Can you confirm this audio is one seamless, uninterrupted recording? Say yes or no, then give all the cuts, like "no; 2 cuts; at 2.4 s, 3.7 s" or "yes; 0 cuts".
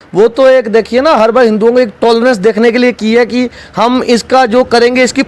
yes; 0 cuts